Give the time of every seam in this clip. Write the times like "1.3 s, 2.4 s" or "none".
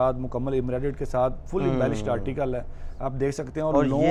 none